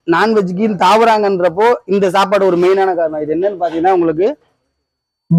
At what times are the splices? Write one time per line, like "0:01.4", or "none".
none